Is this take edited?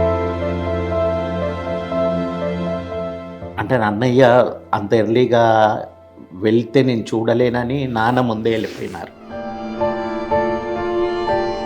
yes; 1 cut; at 3.2 s

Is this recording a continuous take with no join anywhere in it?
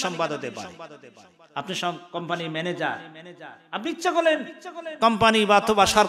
yes; 0 cuts

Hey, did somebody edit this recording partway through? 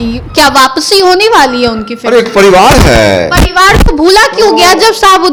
no; 0 cuts

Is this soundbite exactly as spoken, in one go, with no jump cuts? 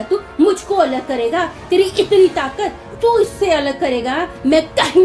yes; 0 cuts

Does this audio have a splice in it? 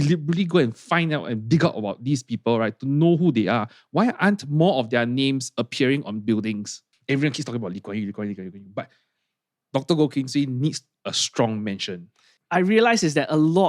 yes; 2 cuts; at 6.9 s, 12.3 s

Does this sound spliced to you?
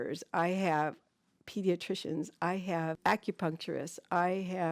yes; 1 cut; at 3.0 s

